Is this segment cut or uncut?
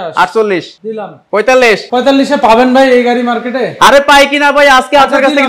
cut